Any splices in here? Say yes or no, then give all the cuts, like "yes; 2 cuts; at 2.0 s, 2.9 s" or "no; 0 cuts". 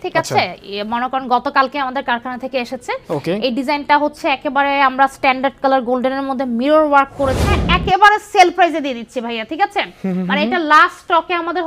yes; 1 cut; at 7.6 s